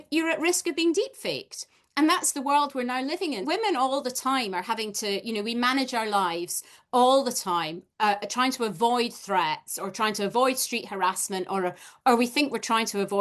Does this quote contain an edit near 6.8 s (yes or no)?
no